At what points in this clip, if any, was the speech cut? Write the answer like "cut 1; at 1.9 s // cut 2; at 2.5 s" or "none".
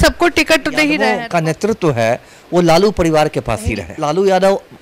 cut 1; at 1.1 s // cut 2; at 3.9 s